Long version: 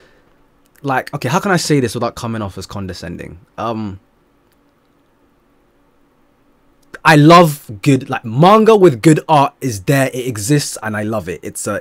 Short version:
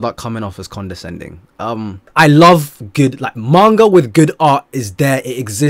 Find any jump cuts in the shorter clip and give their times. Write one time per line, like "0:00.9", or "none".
0:02.0